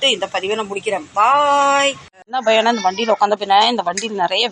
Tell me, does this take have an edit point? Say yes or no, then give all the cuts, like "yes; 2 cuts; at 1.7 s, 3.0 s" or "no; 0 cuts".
yes; 1 cut; at 2.1 s